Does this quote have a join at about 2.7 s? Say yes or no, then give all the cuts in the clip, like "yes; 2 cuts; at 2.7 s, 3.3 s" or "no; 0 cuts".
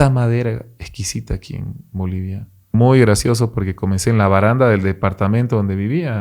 yes; 1 cut; at 2.7 s